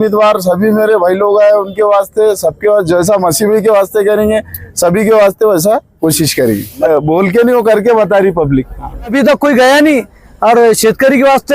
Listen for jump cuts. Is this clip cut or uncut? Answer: cut